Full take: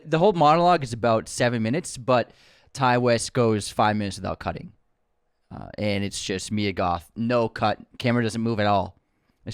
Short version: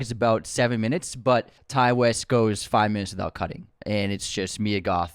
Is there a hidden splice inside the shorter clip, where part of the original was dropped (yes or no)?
yes